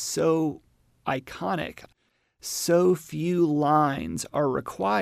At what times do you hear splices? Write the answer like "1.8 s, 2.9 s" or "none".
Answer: 1.9 s